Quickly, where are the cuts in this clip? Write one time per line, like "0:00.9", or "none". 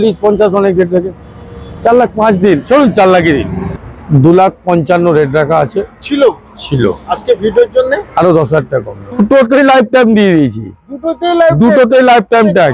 0:03.6
0:09.2